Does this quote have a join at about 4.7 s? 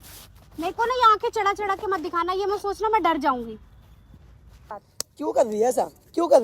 yes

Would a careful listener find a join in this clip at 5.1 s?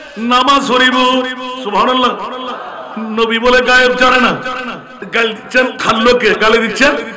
yes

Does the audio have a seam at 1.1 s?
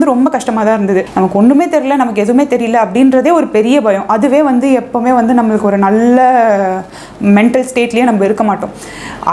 yes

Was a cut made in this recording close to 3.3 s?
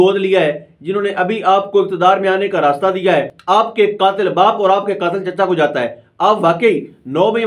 yes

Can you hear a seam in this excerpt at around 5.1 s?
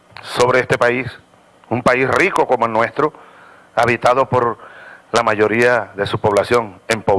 yes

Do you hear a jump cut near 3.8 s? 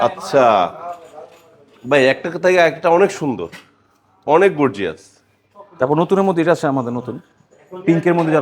no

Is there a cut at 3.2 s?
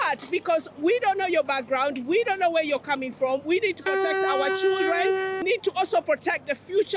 no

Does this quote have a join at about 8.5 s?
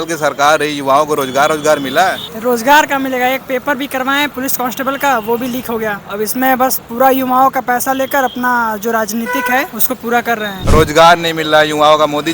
no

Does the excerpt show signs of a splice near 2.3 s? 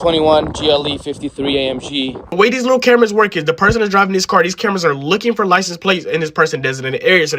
yes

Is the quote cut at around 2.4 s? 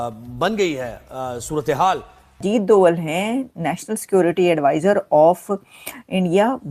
yes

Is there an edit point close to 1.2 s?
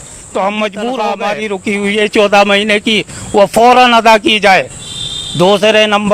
yes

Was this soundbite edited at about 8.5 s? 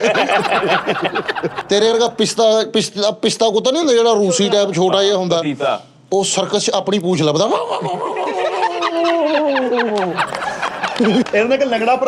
no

